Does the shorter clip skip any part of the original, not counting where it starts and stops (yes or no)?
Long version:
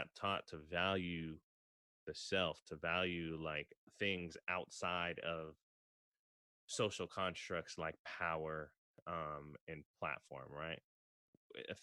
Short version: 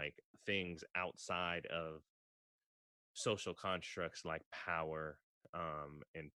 no